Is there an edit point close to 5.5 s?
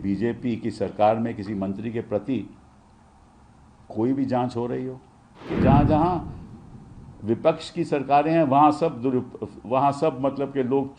yes; 1 cut; at 5.5 s

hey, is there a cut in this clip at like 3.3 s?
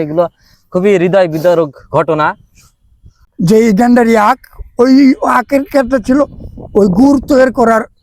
yes; 1 cut; at 3.3 s

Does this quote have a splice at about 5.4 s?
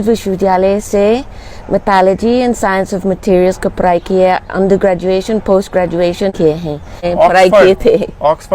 no; 1 cut; at 6.7 s

